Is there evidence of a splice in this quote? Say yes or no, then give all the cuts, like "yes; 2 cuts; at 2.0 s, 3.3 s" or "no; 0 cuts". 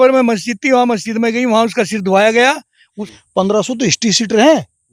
yes; 1 cut; at 2.7 s